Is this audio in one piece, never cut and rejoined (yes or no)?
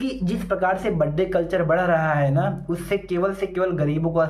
yes